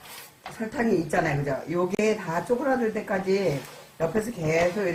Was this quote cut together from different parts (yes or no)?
no